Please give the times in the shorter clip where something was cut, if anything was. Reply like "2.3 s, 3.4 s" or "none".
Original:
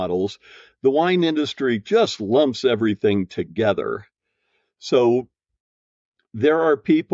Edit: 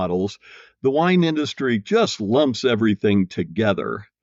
none